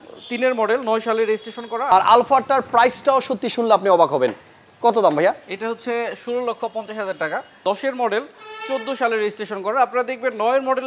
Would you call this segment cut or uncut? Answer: cut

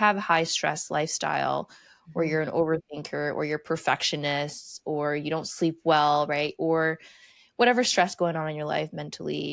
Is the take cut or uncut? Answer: uncut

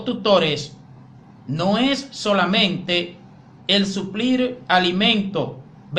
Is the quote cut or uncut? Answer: cut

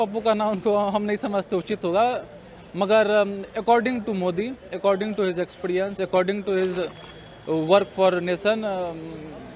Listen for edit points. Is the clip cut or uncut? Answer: uncut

